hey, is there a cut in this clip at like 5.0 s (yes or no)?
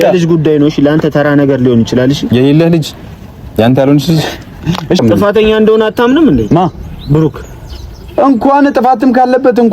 yes